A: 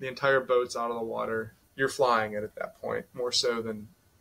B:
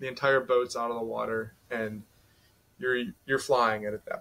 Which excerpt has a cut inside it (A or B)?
A